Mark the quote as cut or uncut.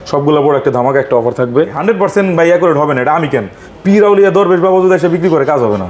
cut